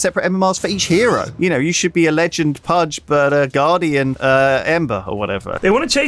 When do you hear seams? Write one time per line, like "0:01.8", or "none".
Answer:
0:01.3
0:02.9
0:04.2
0:05.0

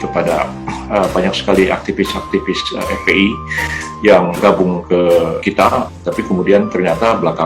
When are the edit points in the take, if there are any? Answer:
0:04.4
0:05.6

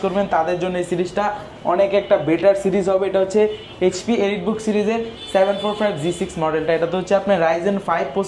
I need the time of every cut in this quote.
none

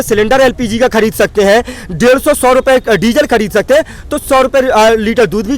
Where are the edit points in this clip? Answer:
none

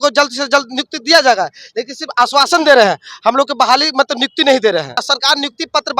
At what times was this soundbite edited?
0:05.0

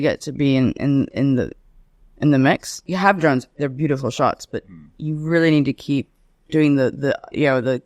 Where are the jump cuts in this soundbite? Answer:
0:02.8

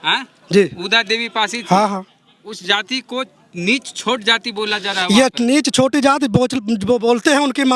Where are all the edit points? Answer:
none

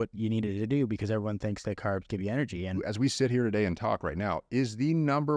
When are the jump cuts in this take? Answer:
0:02.8

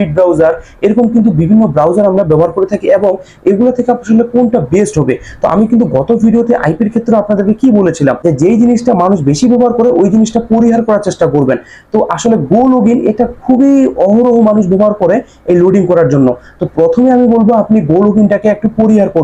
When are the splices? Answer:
none

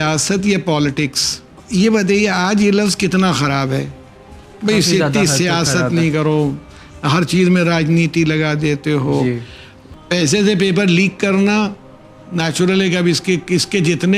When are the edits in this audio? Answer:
0:01.6
0:09.8

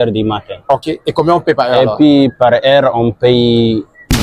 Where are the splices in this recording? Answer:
none

